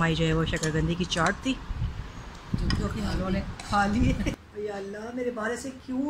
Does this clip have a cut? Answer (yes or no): yes